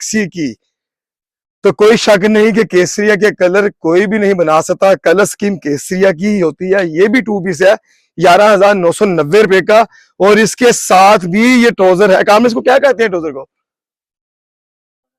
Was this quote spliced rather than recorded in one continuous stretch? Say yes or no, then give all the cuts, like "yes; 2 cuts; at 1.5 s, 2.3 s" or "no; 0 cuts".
no; 0 cuts